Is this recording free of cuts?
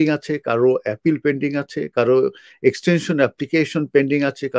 yes; 0 cuts

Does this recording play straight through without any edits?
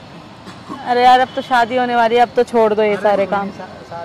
yes; 0 cuts

